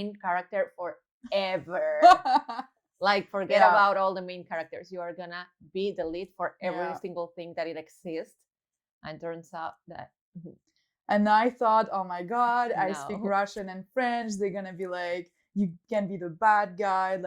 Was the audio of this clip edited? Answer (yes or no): no